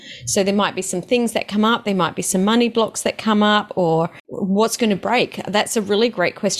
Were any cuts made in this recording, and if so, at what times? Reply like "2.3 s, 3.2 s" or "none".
4.3 s